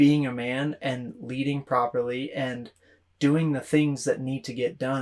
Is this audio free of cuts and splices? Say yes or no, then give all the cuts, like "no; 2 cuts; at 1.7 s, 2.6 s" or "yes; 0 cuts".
yes; 0 cuts